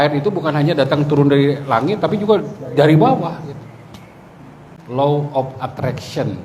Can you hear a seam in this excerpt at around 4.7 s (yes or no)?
yes